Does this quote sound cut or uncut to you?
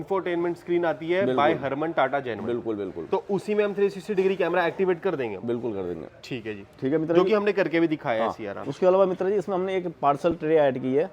uncut